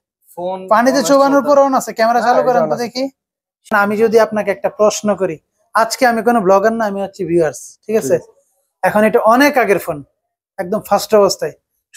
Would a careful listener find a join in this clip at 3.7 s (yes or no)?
yes